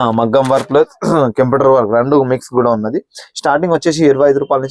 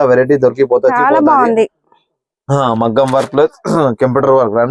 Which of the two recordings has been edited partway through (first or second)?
second